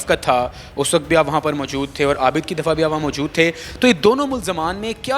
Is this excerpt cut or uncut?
uncut